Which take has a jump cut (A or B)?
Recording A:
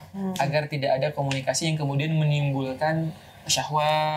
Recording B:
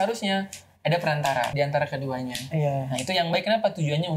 B